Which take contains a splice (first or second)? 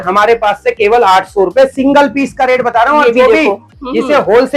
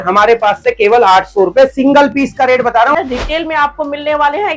second